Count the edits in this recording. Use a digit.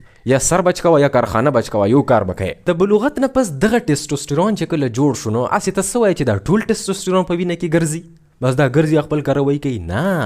1